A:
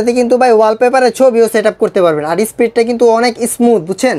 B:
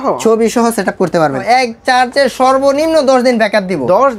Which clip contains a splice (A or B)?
B